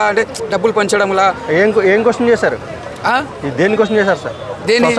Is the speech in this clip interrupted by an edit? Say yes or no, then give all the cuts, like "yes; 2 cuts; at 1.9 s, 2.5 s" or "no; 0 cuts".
no; 0 cuts